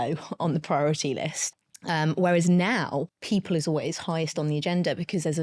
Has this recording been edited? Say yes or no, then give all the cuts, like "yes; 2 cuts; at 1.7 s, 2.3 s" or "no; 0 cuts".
yes; 2 cuts; at 1.4 s, 3.1 s